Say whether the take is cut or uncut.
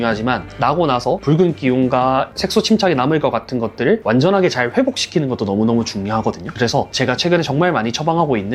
uncut